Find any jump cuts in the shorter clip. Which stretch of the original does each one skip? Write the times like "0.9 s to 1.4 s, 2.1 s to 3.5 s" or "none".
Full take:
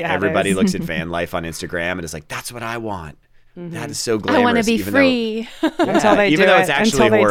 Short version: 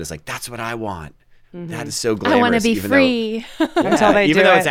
none